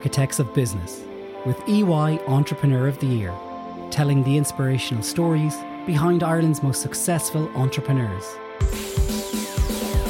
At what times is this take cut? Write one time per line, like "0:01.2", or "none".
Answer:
none